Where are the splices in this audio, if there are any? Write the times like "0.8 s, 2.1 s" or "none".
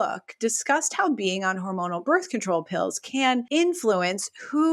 3.5 s